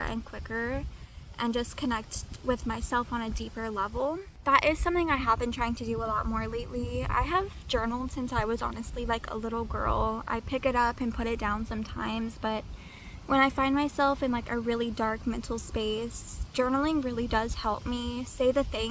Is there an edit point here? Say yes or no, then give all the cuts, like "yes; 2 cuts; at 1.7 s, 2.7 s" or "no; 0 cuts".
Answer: no; 0 cuts